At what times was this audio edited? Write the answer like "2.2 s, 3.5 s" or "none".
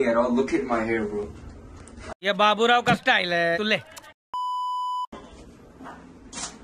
none